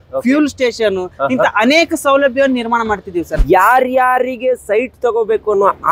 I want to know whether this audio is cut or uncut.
cut